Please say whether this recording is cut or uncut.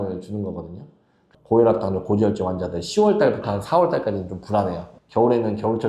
cut